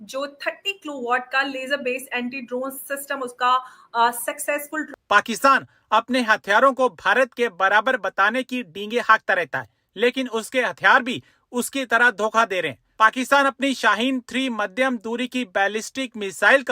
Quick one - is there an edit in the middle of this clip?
yes; 1 cut; at 4.9 s

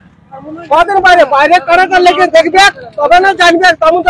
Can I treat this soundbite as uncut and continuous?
yes; 0 cuts

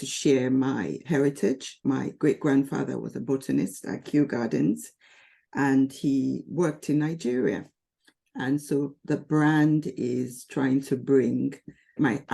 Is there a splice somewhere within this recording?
yes; 1 cut; at 1.7 s

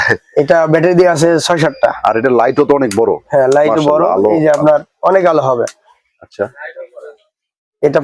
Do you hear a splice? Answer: no; 0 cuts

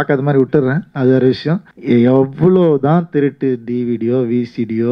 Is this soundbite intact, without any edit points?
no; 1 cut; at 1.7 s

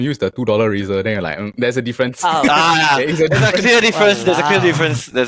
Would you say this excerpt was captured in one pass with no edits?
yes; 0 cuts

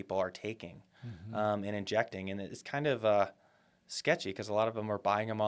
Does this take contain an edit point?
no; 0 cuts

